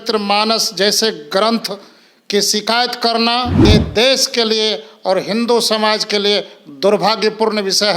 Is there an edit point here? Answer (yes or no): yes